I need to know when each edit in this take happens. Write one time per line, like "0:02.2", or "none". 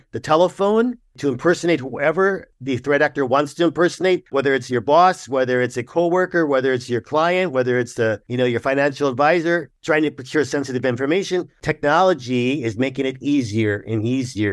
0:02.5
0:04.3
0:08.2
0:09.7
0:11.6